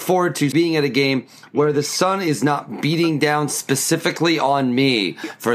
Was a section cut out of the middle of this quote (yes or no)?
no